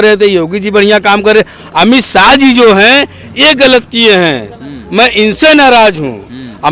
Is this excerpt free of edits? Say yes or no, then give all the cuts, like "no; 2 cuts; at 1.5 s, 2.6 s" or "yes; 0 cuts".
yes; 0 cuts